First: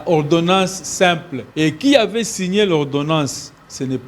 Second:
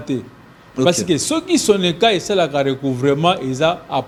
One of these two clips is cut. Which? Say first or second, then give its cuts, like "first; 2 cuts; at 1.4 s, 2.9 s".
first; 1 cut; at 1.4 s